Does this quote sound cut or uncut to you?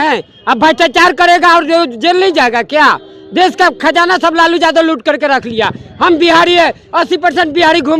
uncut